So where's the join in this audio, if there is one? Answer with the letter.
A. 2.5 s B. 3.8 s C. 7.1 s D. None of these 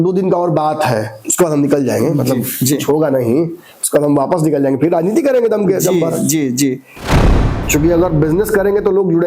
C